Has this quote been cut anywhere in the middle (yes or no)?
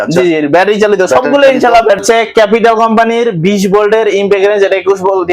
yes